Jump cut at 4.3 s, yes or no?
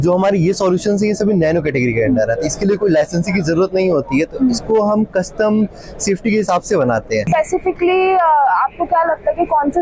no